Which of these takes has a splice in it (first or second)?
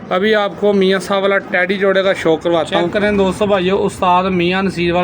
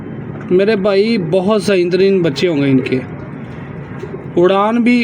first